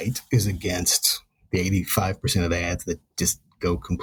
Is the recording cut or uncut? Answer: uncut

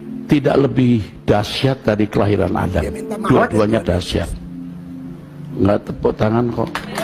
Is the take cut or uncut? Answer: uncut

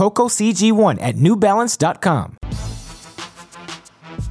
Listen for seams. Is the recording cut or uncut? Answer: cut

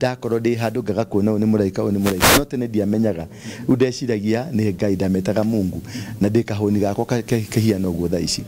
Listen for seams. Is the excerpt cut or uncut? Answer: uncut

